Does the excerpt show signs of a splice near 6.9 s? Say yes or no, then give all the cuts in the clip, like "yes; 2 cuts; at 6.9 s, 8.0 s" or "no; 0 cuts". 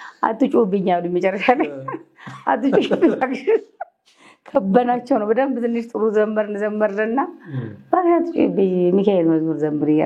no; 0 cuts